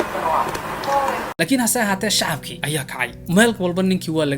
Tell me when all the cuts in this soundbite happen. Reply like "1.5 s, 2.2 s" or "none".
1.3 s